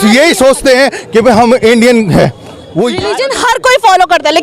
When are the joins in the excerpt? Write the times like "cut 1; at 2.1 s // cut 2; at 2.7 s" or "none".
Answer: cut 1; at 3.1 s